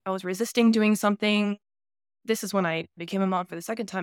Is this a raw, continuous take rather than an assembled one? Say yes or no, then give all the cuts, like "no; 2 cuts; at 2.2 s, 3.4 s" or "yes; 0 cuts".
yes; 0 cuts